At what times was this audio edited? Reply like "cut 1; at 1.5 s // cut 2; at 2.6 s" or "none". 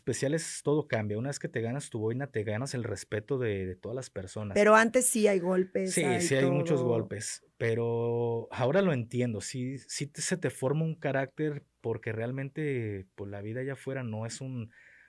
none